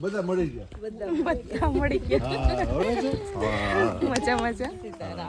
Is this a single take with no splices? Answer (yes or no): yes